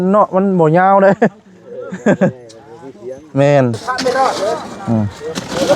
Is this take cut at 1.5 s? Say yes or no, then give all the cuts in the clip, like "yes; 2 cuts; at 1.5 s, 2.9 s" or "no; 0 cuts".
no; 1 cut; at 3.8 s